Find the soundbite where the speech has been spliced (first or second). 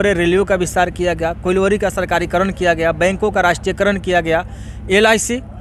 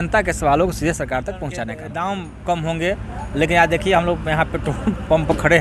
second